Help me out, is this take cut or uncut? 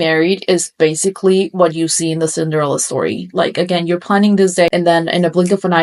uncut